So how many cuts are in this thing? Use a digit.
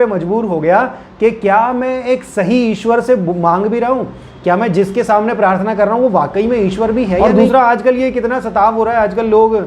1